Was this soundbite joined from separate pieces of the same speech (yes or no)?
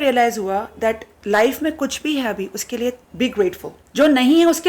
yes